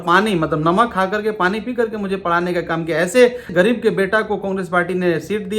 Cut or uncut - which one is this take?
cut